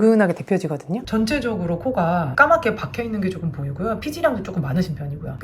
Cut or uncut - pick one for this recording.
cut